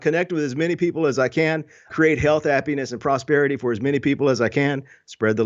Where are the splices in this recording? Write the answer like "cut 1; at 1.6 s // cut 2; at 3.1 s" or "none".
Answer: cut 1; at 1.9 s